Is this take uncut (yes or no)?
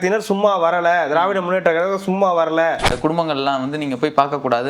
no